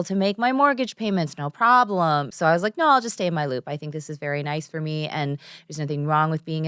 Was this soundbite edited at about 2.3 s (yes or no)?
yes